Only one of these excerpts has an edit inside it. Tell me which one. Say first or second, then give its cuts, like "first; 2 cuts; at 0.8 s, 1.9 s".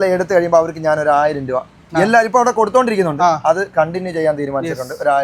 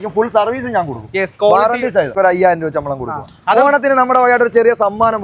second; 1 cut; at 2.1 s